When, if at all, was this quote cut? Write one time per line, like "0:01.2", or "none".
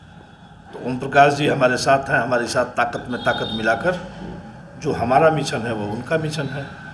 none